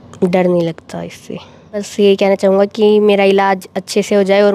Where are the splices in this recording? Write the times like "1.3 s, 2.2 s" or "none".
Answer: 1.9 s